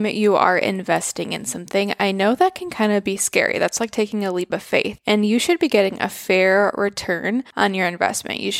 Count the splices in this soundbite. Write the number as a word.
zero